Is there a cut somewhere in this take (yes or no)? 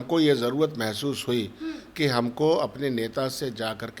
no